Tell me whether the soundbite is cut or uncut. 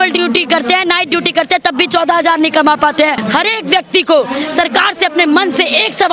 cut